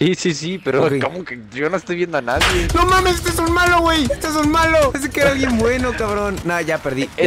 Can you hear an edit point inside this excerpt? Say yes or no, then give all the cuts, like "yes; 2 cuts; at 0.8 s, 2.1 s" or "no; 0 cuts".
no; 0 cuts